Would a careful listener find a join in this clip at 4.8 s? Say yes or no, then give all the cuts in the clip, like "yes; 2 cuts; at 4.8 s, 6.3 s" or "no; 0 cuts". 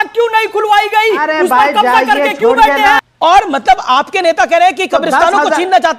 no; 1 cut; at 3.0 s